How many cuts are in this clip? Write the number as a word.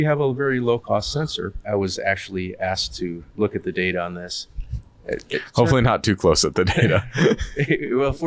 two